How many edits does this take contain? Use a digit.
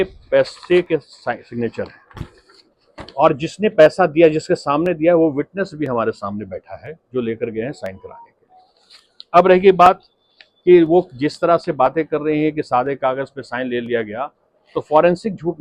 0